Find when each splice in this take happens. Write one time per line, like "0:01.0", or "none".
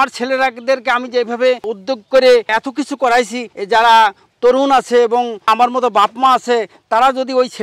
none